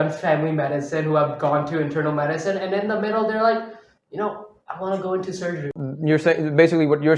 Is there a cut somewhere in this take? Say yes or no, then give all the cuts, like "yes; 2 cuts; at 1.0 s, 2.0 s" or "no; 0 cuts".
yes; 1 cut; at 5.8 s